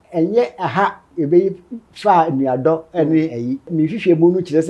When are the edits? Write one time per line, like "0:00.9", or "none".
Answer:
0:01.1
0:03.7

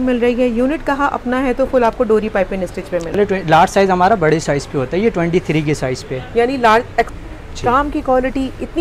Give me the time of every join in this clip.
0:03.2
0:07.1

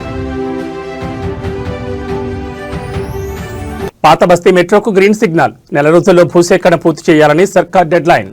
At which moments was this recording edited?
none

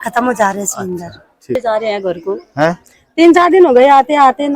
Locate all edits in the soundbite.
0:01.6

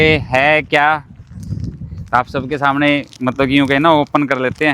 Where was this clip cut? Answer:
none

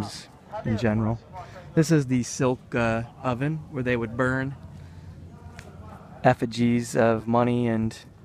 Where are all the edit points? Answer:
0:04.1

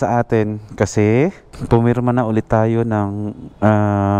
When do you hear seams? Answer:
0:01.5

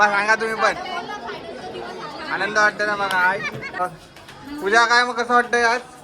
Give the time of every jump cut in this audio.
0:03.8

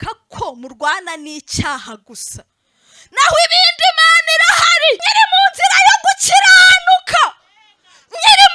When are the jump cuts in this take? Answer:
0:05.0

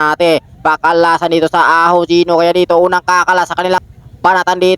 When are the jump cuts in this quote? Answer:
0:03.8

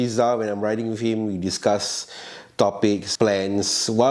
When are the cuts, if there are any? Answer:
0:03.1

